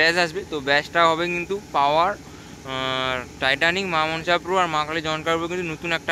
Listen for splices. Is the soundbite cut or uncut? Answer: uncut